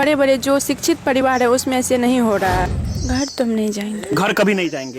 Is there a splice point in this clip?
yes; 1 cut; at 2.7 s

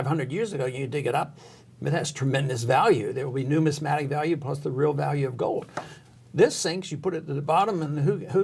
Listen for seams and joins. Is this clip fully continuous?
yes; 0 cuts

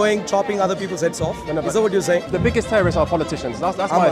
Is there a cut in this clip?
yes; 1 cut; at 2.3 s

